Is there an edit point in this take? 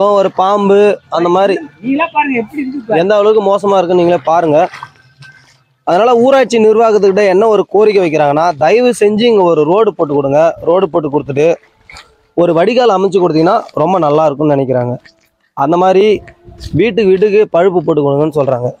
no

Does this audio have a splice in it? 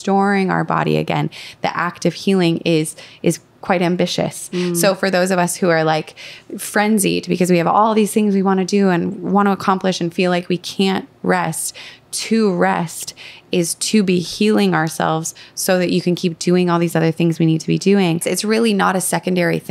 yes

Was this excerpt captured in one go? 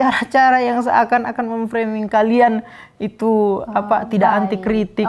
yes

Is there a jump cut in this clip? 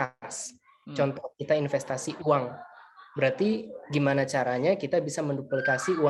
no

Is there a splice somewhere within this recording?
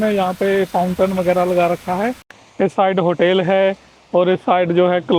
no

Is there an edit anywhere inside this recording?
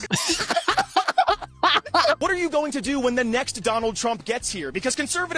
yes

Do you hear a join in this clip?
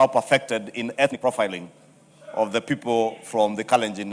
yes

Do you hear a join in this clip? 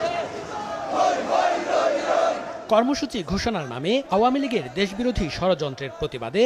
no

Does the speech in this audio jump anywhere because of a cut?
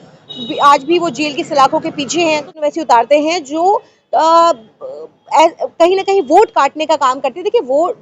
yes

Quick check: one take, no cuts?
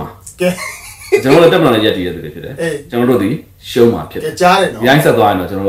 yes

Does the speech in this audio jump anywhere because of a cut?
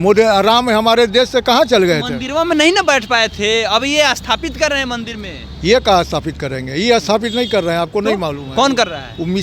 no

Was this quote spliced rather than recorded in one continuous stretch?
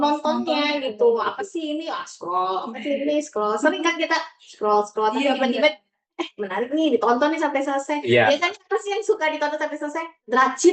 no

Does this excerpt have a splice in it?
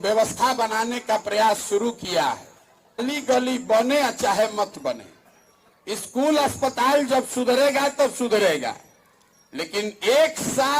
yes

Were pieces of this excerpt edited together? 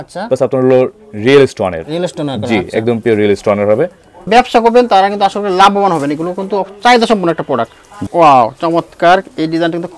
yes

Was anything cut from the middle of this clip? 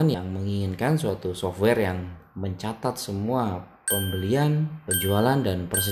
no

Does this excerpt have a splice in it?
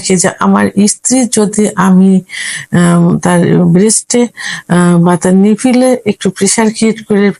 no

